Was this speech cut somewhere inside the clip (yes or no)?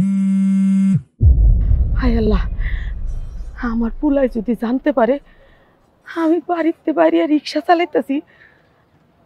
yes